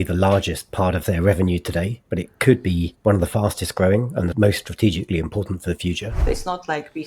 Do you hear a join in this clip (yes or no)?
yes